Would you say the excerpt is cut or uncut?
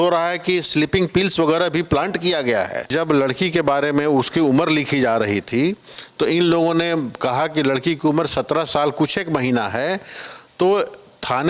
cut